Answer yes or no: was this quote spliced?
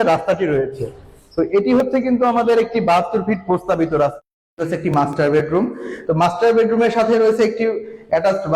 yes